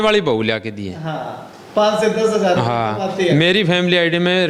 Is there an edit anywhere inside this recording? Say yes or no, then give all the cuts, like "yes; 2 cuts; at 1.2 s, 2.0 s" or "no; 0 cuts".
no; 0 cuts